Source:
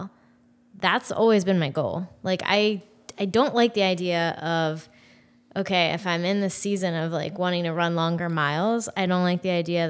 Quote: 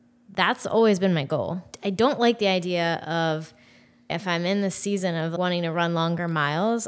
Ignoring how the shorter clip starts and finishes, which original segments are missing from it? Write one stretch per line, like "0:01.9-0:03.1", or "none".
0:02.1-0:03.0
0:05.5-0:05.9
0:07.1-0:07.3